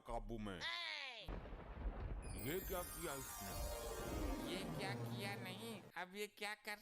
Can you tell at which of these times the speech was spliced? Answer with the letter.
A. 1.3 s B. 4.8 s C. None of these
A